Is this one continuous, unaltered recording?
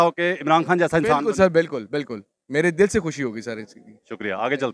yes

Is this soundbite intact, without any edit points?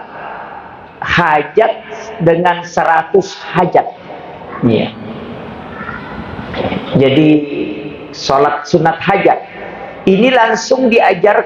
yes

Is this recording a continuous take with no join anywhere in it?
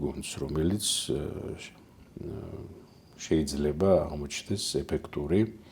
yes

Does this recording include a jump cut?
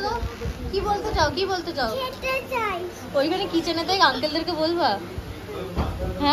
no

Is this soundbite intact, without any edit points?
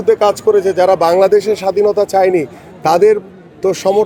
yes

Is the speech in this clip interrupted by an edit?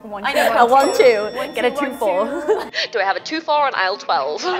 no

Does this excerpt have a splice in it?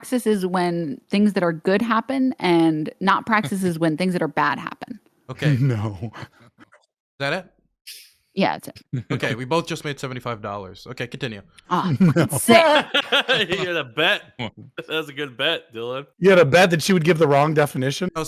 no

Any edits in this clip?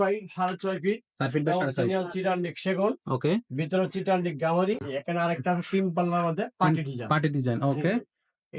yes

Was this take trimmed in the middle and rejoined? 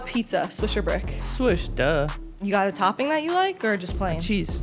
yes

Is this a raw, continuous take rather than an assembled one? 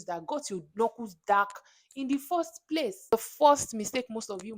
no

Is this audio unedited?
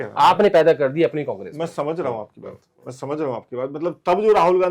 yes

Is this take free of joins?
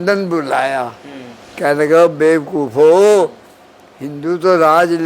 yes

